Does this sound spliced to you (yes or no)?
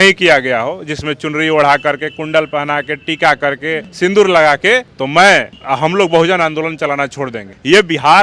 no